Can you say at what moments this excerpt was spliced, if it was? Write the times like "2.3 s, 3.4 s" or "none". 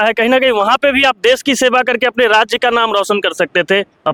none